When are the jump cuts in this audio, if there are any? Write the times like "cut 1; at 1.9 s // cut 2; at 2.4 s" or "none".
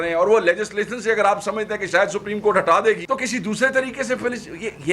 cut 1; at 3.0 s